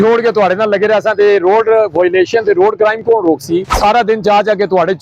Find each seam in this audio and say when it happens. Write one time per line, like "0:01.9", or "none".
0:03.7